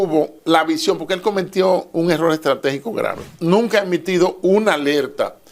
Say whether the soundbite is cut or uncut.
cut